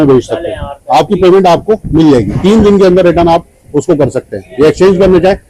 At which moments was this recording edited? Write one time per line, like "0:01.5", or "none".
none